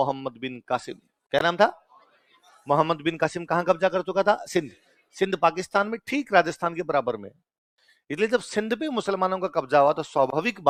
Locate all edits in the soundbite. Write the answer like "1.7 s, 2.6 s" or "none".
none